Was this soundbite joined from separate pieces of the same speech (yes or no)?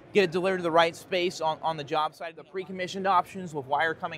yes